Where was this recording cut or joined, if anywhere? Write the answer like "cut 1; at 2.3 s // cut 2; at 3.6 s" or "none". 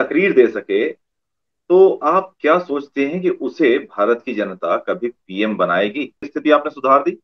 cut 1; at 6.3 s